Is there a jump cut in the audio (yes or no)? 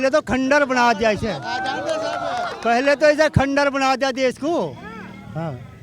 no